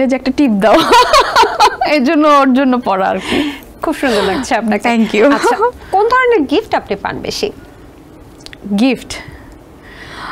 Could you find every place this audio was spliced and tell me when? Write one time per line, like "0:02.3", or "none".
none